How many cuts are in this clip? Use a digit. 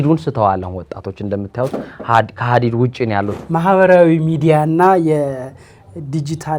1